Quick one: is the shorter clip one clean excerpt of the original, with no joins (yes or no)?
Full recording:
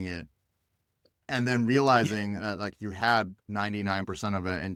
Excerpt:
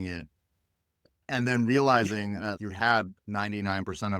no